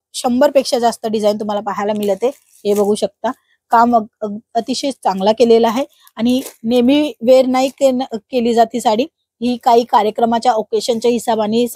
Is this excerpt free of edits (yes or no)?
yes